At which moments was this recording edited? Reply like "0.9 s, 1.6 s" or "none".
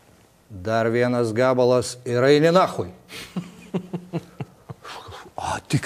none